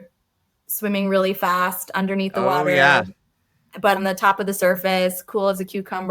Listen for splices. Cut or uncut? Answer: cut